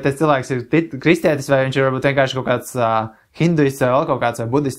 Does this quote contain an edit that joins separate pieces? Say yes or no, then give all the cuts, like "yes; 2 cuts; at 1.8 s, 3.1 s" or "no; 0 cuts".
no; 0 cuts